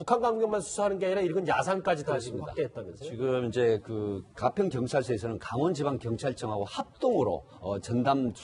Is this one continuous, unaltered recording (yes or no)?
no